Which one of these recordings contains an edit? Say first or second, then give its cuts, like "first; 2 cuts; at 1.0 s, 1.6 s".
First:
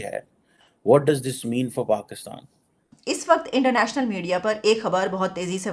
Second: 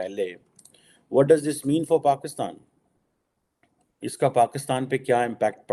first; 1 cut; at 3.0 s